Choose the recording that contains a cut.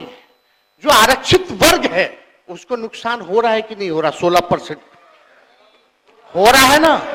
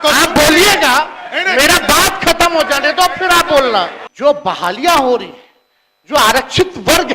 second; 1 cut; at 4.0 s

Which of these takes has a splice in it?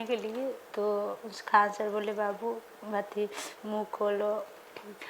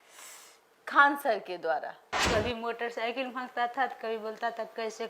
second; 1 cut; at 2.1 s

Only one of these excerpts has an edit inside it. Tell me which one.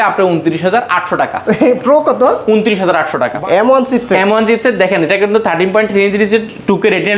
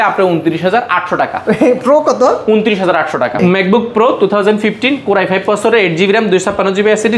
first; 1 cut; at 3.3 s

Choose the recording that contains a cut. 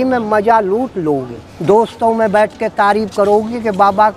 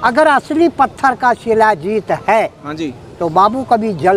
first; 1 cut; at 1.5 s

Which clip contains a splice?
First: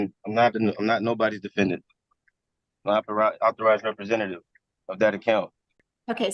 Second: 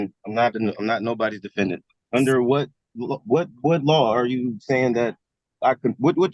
second; 1 cut; at 1.9 s

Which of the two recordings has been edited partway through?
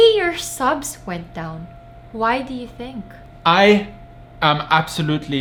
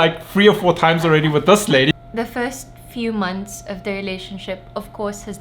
second; 1 cut; at 1.9 s

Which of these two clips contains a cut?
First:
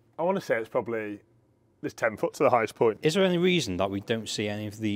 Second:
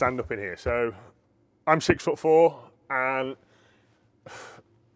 first; 1 cut; at 3.0 s

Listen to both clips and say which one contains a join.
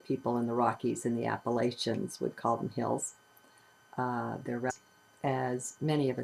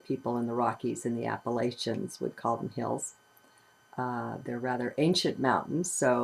second; 1 cut; at 4.7 s

